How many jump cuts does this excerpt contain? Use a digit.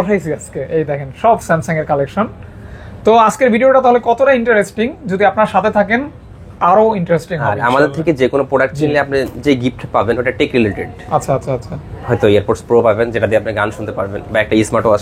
0